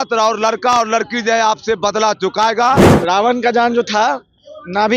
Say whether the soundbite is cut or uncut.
cut